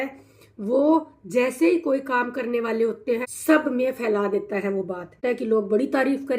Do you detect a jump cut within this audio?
yes; 2 cuts; at 3.3 s, 5.2 s

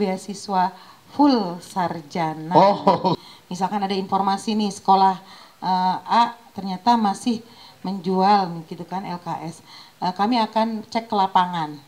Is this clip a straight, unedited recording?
no; 1 cut; at 3.2 s

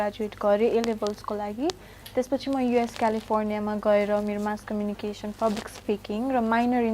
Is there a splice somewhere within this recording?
no; 0 cuts

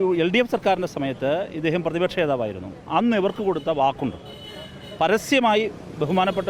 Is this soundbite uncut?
yes; 0 cuts

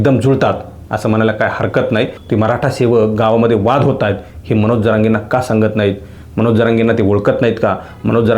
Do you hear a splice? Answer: yes; 1 cut; at 2.2 s

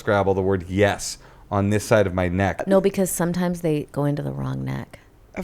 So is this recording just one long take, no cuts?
no; 1 cut; at 2.6 s

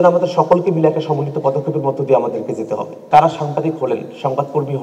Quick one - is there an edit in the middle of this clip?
yes; 1 cut; at 3.0 s

